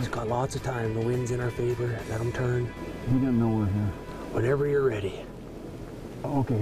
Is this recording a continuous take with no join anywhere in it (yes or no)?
no